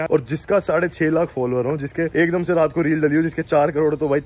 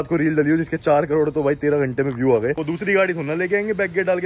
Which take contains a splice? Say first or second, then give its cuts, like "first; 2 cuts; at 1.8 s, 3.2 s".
second; 1 cut; at 2.6 s